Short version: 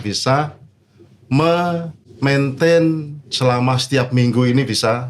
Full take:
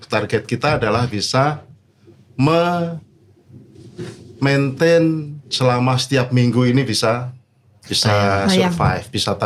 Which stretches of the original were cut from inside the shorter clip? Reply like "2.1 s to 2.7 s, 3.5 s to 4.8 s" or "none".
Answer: 3.1 s to 4.2 s